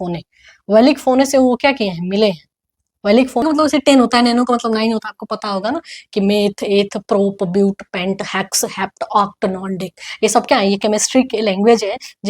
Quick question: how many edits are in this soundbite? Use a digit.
1